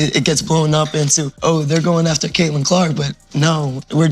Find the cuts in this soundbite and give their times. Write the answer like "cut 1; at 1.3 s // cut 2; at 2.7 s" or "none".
cut 1; at 1.3 s